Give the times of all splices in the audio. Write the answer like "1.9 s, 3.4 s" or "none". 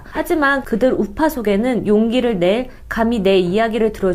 none